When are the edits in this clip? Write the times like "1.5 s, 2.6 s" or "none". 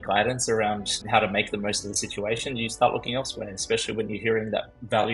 1.0 s